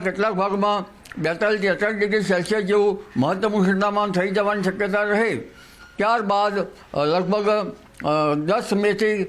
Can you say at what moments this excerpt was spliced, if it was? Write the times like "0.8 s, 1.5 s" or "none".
none